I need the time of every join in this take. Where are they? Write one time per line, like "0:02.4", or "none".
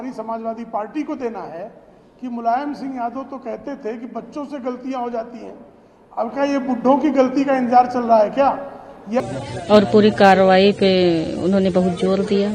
0:09.2